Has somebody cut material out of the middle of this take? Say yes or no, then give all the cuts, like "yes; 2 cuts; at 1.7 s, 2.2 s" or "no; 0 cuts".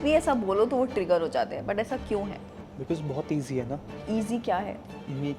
no; 0 cuts